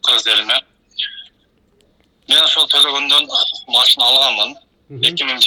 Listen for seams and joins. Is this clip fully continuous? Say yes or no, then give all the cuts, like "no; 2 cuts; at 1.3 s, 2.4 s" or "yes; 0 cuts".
yes; 0 cuts